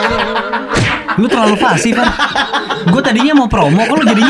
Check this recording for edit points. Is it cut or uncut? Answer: uncut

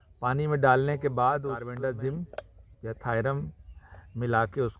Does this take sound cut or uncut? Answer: cut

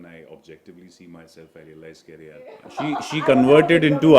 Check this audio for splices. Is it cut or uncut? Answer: cut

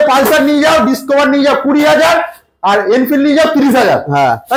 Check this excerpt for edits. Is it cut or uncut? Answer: uncut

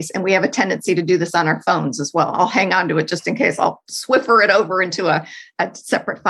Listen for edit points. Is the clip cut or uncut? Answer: cut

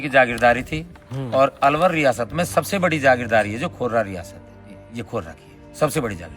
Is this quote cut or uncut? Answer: uncut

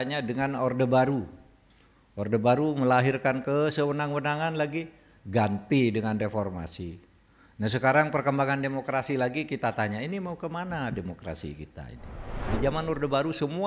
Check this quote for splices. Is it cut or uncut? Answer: cut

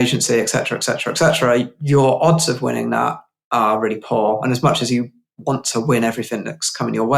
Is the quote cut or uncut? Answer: uncut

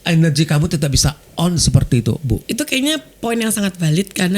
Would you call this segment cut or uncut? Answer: cut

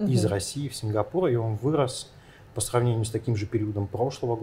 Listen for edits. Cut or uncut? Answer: uncut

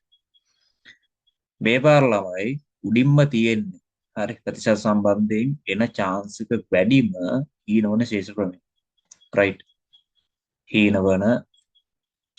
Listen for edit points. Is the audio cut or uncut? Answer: uncut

